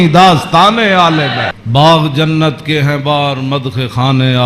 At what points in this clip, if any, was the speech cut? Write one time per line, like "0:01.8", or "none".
0:01.6

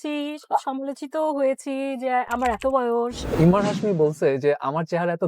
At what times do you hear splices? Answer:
0:03.3

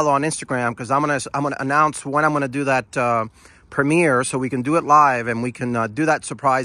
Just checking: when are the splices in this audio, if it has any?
none

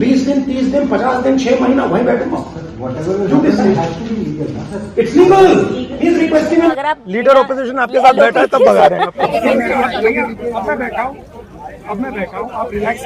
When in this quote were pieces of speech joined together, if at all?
0:06.7
0:09.3

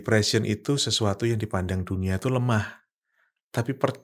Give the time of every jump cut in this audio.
none

